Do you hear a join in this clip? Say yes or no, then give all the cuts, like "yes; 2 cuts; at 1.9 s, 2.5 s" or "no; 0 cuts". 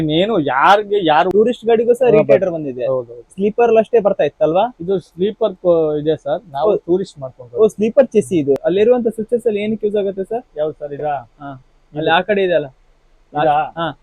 yes; 2 cuts; at 1.3 s, 8.6 s